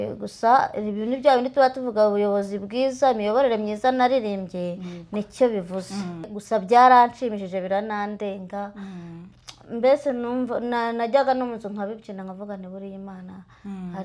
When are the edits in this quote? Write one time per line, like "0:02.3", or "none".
0:06.3